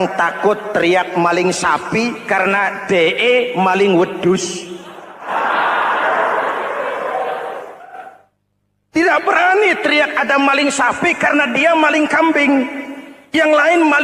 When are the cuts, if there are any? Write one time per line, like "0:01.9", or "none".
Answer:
none